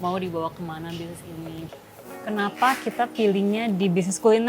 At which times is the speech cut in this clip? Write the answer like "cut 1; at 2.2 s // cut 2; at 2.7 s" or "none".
cut 1; at 1.7 s